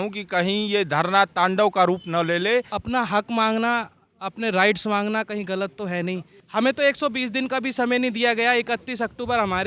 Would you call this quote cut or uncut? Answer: cut